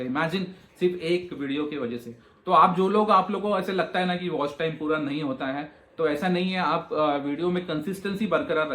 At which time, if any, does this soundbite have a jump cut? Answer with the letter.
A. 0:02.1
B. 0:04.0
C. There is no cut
C